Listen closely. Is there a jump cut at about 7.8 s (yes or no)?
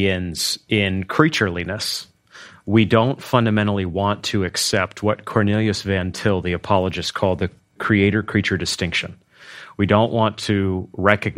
yes